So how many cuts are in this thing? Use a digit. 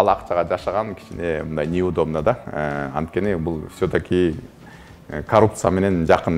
0